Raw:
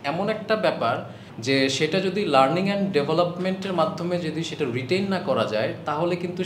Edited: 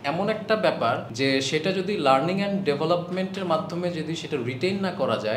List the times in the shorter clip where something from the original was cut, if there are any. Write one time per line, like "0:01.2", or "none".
0:01.1